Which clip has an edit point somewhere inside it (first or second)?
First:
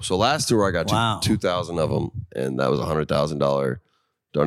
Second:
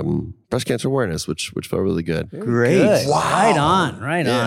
second